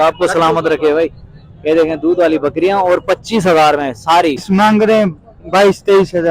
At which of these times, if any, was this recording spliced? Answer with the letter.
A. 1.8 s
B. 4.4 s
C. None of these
B